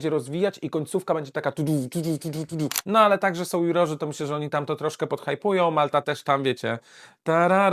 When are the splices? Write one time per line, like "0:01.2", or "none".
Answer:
0:02.7